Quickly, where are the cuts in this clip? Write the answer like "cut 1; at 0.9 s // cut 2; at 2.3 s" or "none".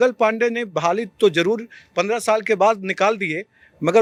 none